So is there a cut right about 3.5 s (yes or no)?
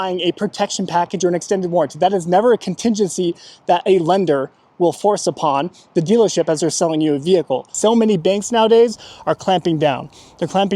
no